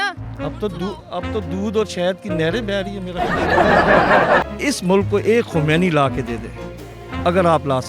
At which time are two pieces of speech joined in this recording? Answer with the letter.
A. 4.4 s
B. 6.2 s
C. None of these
A